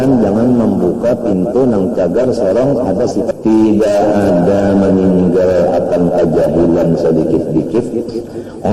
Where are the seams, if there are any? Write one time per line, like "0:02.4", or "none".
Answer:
0:03.3